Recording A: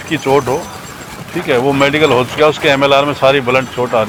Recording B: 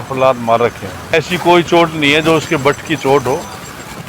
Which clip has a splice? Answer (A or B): B